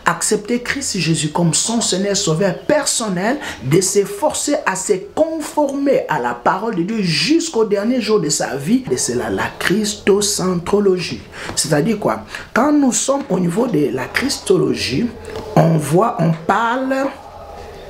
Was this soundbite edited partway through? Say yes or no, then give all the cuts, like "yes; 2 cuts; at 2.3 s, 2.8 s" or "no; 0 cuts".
yes; 1 cut; at 8.9 s